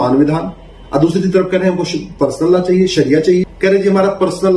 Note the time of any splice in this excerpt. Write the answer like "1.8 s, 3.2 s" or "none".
3.5 s